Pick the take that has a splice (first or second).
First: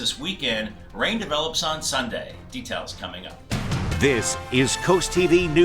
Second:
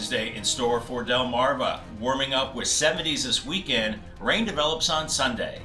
first